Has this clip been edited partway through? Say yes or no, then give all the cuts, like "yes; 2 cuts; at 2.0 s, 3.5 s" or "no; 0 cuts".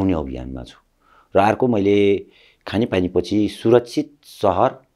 no; 0 cuts